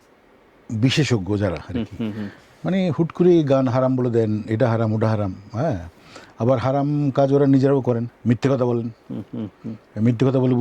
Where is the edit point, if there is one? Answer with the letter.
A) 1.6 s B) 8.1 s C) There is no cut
B